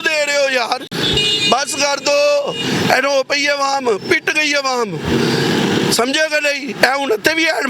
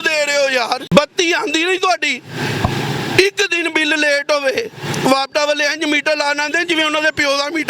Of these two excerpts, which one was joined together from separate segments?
second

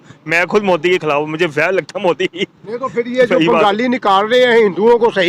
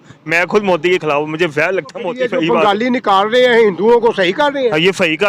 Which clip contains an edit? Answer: second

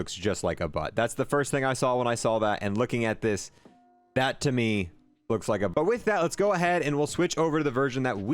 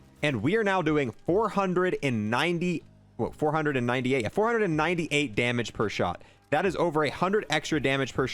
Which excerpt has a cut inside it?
first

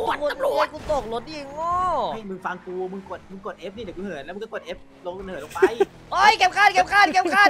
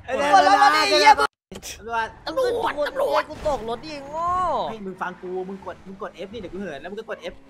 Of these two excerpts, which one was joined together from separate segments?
second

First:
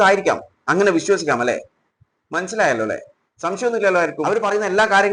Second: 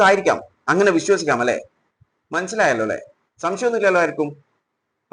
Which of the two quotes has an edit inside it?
first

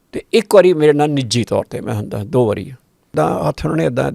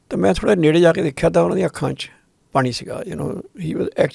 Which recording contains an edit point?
first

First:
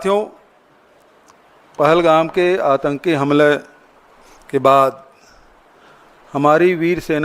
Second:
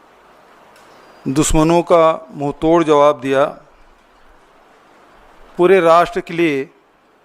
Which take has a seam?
first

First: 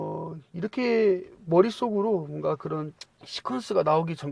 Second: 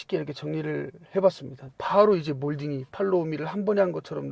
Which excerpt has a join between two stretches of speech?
second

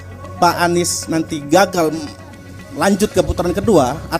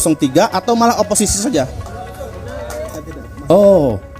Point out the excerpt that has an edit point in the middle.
second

